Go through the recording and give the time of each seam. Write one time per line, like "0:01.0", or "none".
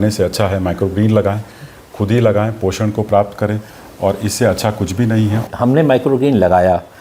0:05.4